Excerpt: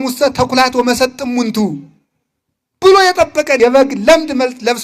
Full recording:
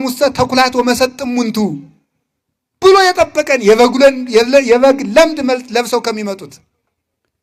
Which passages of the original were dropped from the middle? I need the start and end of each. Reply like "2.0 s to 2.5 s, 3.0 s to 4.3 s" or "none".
3.6 s to 4.7 s